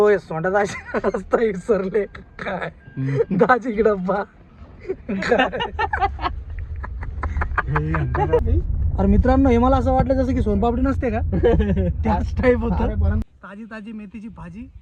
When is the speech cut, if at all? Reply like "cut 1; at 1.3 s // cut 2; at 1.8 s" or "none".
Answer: cut 1; at 8.4 s // cut 2; at 13.2 s